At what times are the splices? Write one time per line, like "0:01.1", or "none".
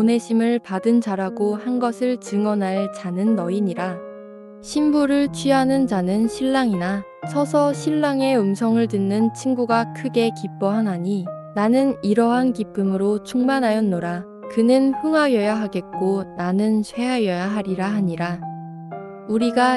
0:04.6